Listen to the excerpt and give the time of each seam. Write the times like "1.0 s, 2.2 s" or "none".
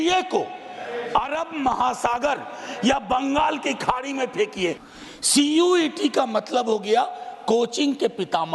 4.8 s